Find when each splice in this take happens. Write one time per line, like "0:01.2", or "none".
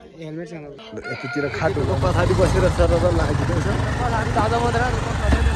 0:01.9